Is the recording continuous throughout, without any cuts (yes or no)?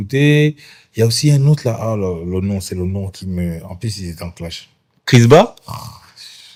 yes